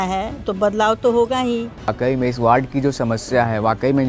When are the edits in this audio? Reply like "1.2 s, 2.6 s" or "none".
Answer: 1.9 s